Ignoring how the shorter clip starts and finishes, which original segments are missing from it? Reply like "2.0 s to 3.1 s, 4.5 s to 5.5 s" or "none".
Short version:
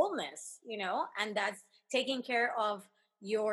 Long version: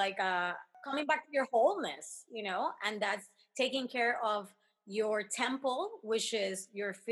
none